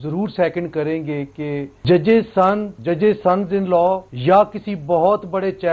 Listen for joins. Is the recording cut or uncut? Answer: cut